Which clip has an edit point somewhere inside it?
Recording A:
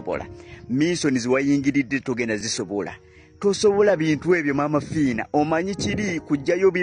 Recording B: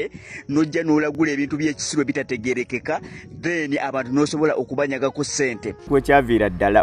B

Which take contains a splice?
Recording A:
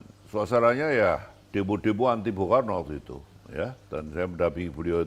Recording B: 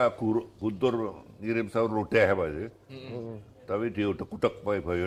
A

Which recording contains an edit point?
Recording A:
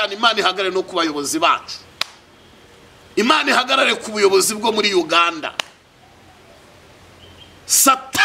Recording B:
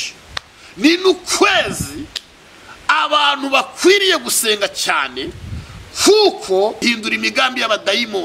B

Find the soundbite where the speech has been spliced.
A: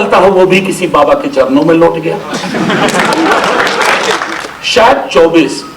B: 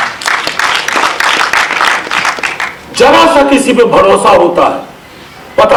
A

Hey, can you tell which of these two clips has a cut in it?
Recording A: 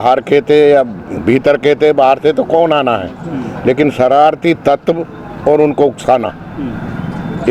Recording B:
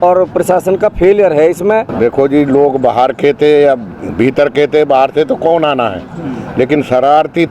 B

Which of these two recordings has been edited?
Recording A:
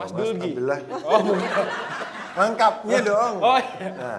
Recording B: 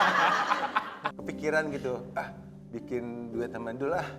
B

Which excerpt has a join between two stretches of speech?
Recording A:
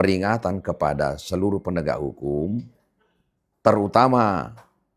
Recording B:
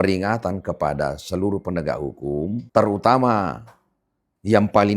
B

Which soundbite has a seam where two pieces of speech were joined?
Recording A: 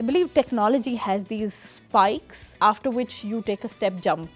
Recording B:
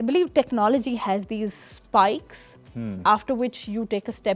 A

